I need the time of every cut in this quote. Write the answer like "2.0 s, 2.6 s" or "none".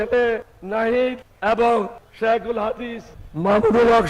1.3 s, 2.0 s